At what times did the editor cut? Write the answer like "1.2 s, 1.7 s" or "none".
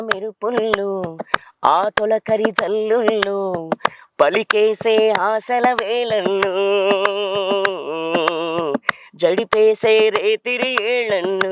none